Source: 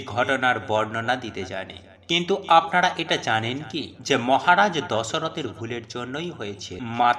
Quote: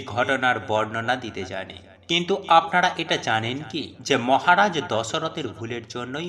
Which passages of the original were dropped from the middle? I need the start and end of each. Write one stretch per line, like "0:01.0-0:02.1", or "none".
none

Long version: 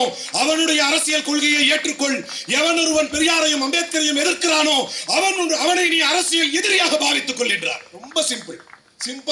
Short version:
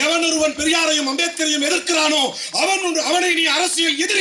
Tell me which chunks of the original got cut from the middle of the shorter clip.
none

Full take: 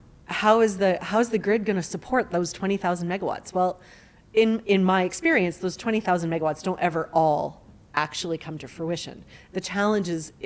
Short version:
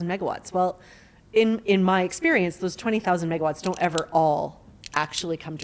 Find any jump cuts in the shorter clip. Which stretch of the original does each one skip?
none

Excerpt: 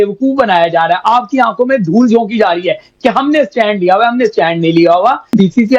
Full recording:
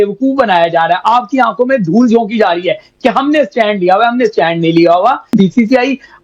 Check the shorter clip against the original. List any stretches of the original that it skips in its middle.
none

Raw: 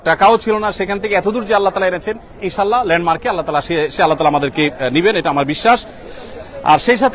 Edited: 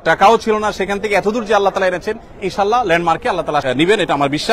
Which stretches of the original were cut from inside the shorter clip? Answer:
0:03.6-0:04.8

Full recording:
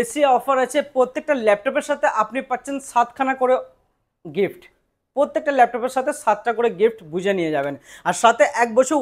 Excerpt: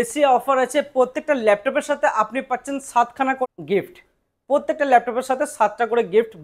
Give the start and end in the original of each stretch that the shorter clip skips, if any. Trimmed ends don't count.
0:03.5-0:04.1

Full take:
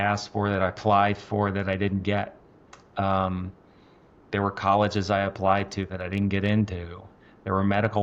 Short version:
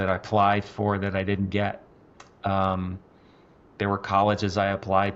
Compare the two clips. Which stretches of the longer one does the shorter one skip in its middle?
none

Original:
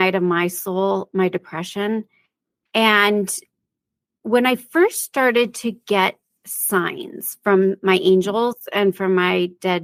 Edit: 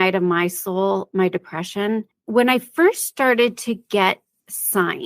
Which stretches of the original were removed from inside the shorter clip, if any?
0:02.1-0:04.1

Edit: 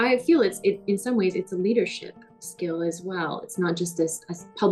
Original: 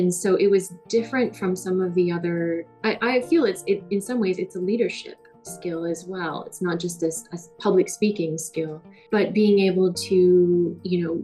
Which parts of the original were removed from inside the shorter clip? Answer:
none

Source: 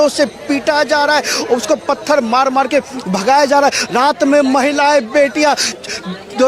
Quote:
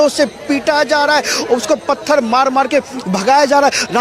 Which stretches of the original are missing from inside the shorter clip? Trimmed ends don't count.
none

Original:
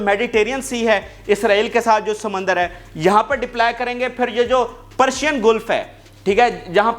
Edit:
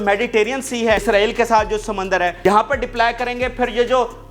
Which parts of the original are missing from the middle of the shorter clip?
0:01.0-0:01.4
0:02.7-0:03.0

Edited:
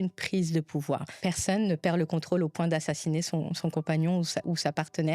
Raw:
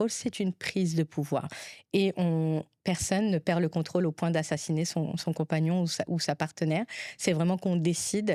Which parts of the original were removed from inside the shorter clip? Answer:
0:01.5-0:02.7

